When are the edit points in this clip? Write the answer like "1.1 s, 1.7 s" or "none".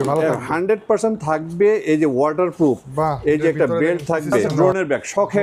4.5 s